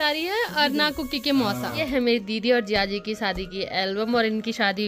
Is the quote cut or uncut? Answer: cut